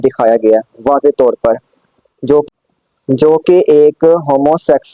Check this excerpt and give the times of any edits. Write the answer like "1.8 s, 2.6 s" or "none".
none